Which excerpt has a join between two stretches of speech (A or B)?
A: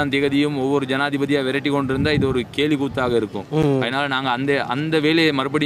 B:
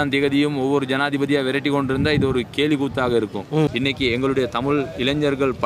B